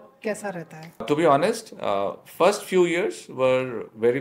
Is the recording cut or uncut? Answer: cut